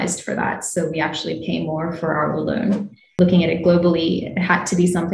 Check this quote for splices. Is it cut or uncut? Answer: cut